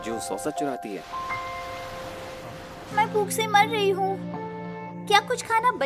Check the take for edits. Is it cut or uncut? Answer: cut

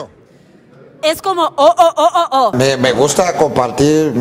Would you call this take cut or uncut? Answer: cut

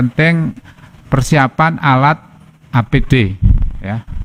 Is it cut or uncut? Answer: uncut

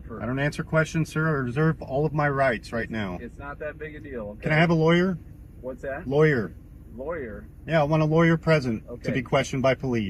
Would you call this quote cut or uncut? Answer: uncut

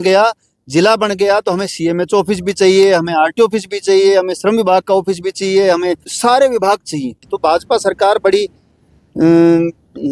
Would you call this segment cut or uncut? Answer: cut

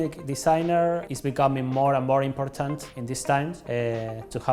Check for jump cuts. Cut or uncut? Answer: uncut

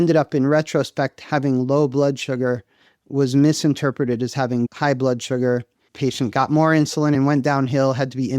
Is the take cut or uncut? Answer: cut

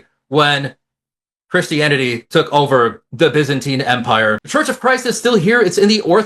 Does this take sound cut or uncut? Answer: cut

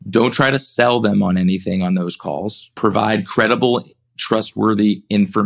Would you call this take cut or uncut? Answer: cut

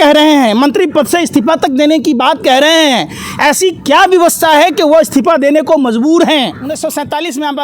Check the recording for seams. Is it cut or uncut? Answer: cut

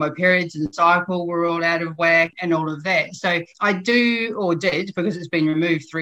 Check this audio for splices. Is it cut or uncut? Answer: cut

